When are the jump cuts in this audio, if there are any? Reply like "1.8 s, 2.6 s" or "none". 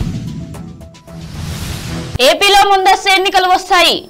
2.2 s